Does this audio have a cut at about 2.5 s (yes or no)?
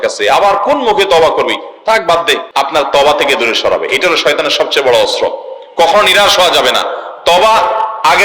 yes